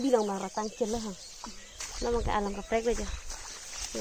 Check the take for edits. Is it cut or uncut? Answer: uncut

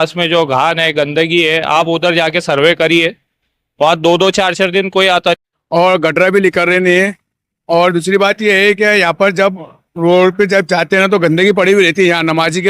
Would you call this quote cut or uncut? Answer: cut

